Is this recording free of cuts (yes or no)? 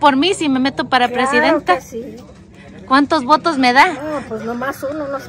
yes